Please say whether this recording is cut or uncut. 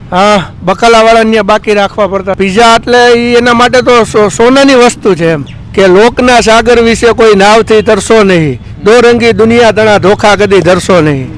cut